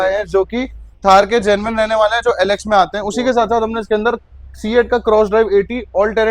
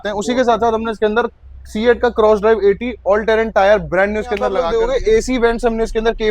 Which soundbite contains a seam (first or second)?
second